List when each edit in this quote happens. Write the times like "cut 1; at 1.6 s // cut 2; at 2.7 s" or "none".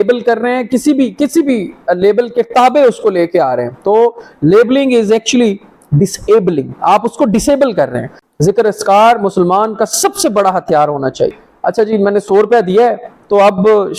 cut 1; at 8.2 s // cut 2; at 11.4 s